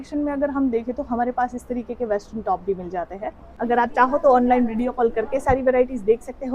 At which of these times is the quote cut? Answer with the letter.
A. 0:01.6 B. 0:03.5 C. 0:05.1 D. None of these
B